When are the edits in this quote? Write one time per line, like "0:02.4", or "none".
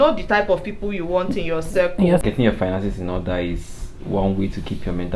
0:02.2